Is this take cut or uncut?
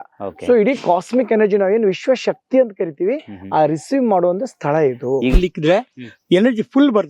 cut